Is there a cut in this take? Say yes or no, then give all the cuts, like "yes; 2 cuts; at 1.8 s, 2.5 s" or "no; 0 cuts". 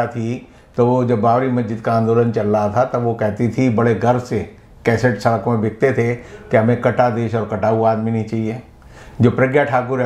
no; 0 cuts